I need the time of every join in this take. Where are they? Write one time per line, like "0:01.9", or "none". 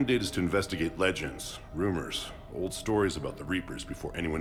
none